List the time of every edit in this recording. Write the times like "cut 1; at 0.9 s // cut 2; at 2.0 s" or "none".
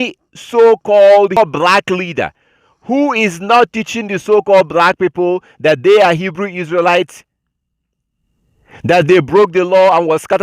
cut 1; at 1.4 s